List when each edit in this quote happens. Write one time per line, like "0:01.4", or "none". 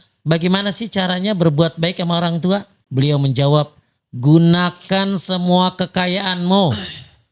0:02.8